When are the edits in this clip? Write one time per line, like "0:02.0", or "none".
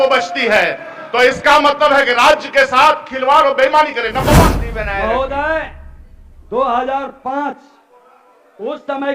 0:04.4